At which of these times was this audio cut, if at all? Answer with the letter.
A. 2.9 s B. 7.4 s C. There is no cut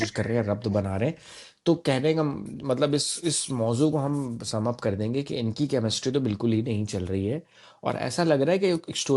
C